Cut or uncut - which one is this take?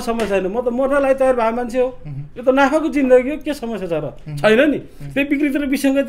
uncut